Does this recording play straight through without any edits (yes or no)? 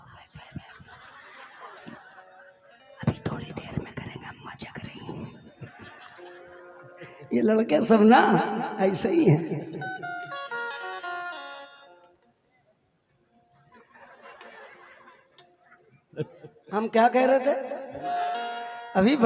no